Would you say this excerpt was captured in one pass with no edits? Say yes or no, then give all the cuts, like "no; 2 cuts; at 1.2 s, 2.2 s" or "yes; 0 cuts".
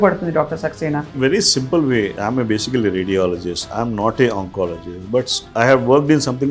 no; 2 cuts; at 1.1 s, 2.1 s